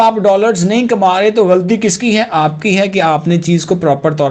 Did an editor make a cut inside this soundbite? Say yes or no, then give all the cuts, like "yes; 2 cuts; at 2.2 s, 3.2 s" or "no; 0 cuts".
no; 0 cuts